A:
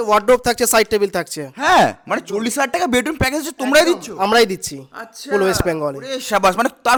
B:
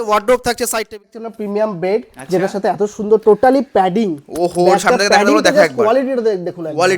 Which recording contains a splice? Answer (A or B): B